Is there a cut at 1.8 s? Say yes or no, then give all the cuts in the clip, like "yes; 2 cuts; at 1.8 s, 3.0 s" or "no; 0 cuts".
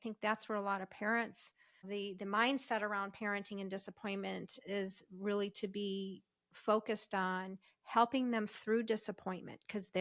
yes; 1 cut; at 1.8 s